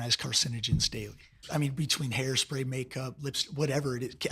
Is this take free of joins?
no; 1 cut; at 1.5 s

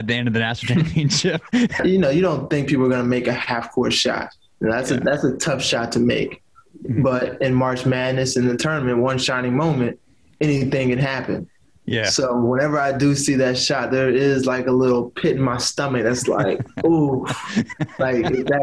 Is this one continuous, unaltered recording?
no; 1 cut; at 1.8 s

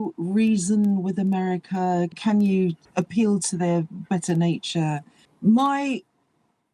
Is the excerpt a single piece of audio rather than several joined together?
no; 3 cuts; at 2.2 s, 2.8 s, 5.1 s

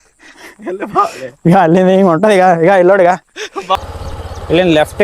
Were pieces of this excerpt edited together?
yes; 1 cut; at 3.8 s

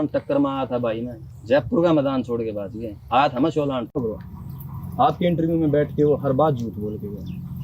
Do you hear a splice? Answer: yes; 1 cut; at 4.0 s

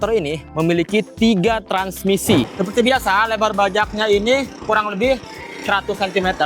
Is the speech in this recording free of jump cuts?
no; 1 cut; at 2.5 s

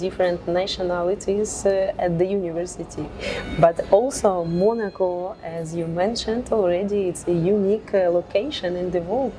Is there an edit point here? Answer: no; 0 cuts

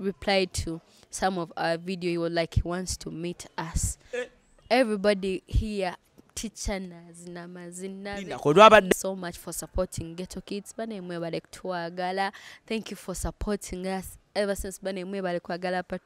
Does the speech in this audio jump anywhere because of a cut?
yes; 1 cut; at 8.9 s

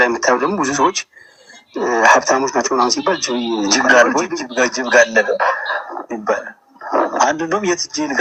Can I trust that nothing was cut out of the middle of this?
yes; 0 cuts

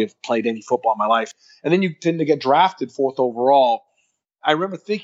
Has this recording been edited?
yes; 1 cut; at 1.3 s

